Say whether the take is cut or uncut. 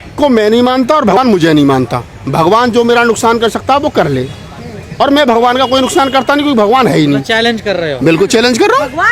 cut